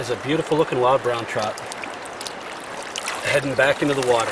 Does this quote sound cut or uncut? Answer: uncut